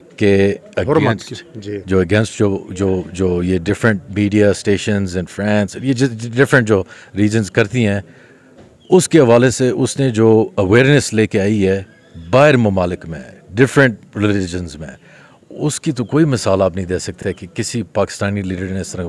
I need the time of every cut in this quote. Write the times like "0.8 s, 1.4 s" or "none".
none